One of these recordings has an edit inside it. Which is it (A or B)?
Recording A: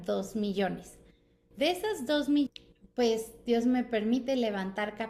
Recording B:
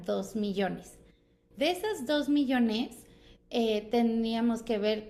A